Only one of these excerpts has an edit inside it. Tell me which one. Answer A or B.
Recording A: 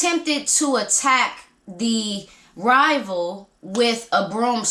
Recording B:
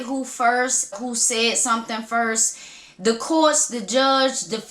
B